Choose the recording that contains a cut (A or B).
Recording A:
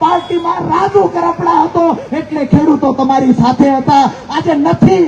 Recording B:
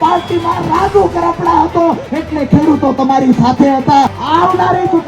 B